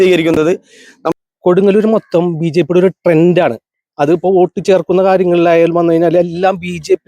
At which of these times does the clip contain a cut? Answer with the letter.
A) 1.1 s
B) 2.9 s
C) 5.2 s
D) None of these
A